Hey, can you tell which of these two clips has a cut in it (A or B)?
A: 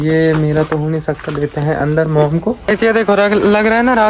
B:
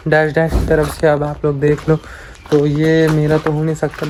A